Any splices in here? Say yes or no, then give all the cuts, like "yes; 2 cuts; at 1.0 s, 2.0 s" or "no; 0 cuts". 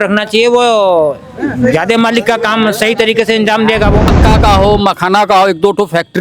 yes; 1 cut; at 4.1 s